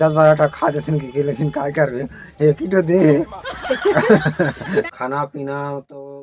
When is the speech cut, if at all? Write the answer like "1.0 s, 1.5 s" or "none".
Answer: 4.7 s